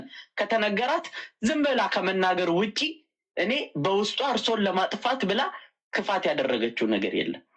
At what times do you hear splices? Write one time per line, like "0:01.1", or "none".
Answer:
none